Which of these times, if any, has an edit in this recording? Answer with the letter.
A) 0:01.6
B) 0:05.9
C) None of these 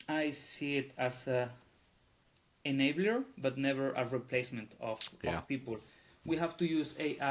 C